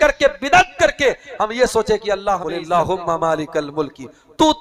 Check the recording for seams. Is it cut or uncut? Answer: cut